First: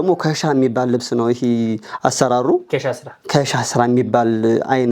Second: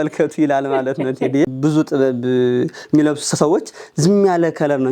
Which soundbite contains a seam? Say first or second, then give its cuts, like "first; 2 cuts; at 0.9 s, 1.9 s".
second; 1 cut; at 1.5 s